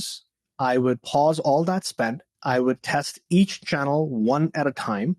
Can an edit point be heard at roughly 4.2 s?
no; 1 cut; at 2.3 s

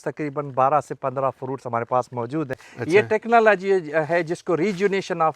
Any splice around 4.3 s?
no; 1 cut; at 2.7 s

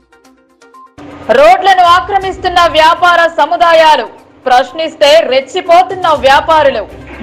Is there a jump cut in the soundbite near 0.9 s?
yes; 1 cut; at 0.9 s

